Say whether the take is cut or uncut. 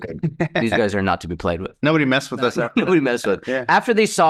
uncut